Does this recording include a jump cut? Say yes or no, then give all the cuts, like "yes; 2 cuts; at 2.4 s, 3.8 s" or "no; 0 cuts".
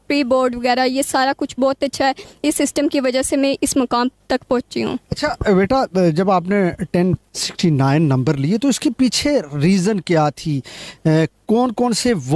no; 0 cuts